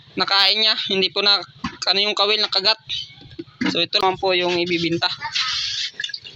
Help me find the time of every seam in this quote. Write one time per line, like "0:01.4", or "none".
0:04.0